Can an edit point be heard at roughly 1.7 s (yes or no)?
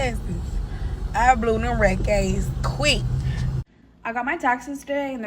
no